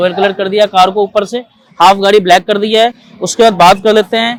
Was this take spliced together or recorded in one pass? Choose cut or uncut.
uncut